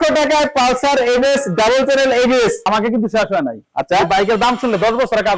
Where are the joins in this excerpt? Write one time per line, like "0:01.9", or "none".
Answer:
0:02.7